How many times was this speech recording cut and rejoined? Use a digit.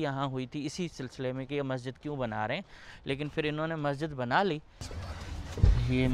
0